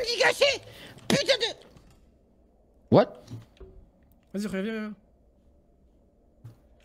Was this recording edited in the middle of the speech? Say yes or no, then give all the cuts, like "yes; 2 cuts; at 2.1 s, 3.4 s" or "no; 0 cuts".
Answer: no; 0 cuts